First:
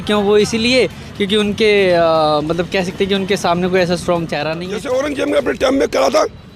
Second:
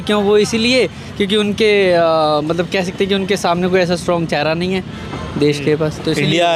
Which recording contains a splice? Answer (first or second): first